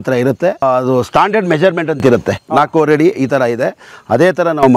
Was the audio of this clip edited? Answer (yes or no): no